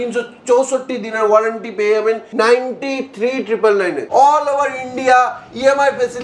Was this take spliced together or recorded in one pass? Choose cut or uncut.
cut